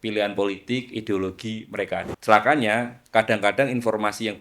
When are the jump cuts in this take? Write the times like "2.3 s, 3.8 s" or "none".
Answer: 2.1 s

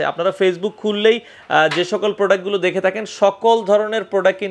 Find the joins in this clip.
none

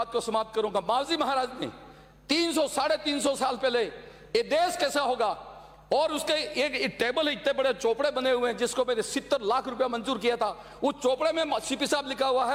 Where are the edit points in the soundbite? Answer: none

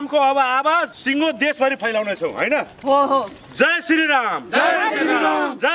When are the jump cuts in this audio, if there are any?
1.0 s

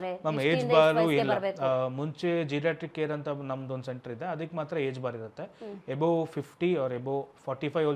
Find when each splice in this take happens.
none

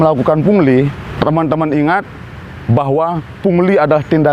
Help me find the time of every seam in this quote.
1.0 s

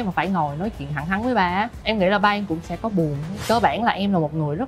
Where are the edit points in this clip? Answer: 1.8 s, 3.3 s

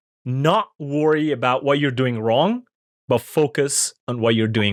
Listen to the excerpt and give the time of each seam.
none

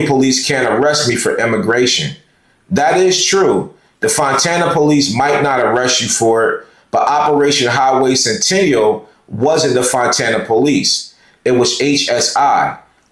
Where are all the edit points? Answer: none

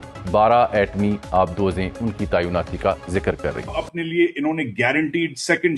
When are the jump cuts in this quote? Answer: 3.7 s

